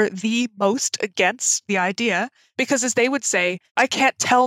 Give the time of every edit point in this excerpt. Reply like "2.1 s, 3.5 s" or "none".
1.7 s, 2.4 s, 3.7 s